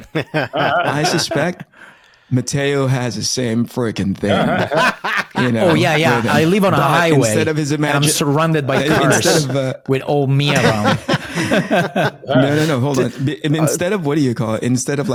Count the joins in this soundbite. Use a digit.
0